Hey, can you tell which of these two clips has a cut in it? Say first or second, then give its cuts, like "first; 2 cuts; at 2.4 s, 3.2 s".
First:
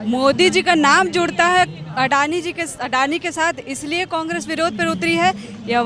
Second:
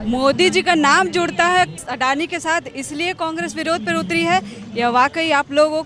second; 1 cut; at 1.8 s